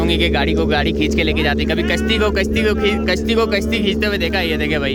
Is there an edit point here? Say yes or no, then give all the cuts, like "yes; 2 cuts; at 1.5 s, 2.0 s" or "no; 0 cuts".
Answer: no; 0 cuts